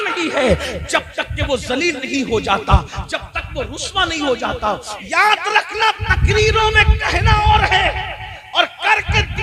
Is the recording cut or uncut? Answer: cut